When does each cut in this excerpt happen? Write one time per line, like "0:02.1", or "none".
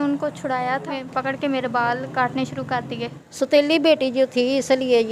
0:01.0
0:03.2